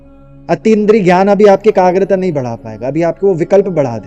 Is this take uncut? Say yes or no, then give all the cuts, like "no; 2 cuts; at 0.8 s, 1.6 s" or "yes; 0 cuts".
yes; 0 cuts